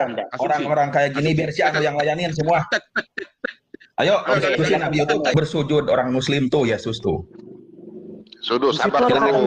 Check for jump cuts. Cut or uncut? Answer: cut